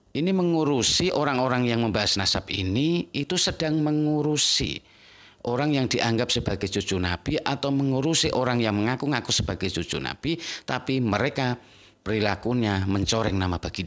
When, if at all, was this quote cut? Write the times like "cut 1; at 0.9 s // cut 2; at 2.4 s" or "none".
none

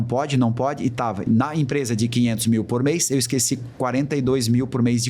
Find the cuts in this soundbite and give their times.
cut 1; at 1.2 s

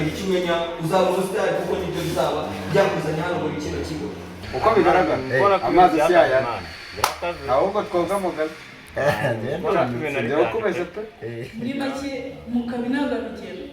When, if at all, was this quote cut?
cut 1; at 4.5 s // cut 2; at 10.9 s

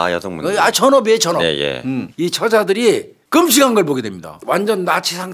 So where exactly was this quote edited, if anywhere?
cut 1; at 2.1 s // cut 2; at 3.1 s // cut 3; at 4.3 s

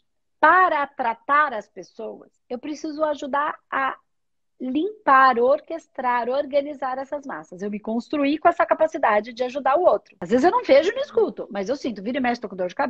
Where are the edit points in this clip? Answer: cut 1; at 2.3 s // cut 2; at 10.1 s

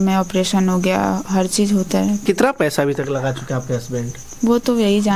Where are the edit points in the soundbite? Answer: cut 1; at 2.2 s

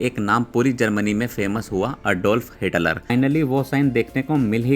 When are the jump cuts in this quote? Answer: cut 1; at 3.1 s

